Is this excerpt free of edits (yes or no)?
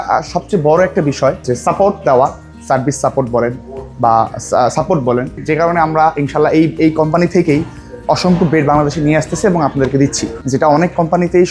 no